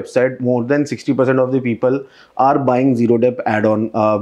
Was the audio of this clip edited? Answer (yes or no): no